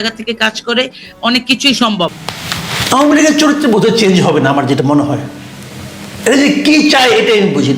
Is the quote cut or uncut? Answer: cut